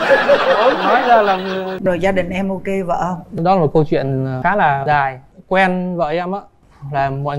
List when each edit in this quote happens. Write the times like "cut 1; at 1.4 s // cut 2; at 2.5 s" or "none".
cut 1; at 1.8 s // cut 2; at 5.3 s